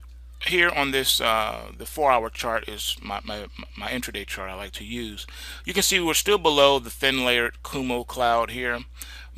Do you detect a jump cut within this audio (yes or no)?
no